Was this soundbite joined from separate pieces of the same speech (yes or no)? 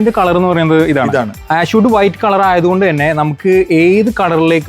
yes